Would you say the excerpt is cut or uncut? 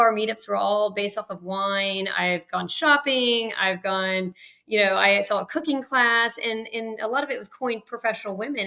uncut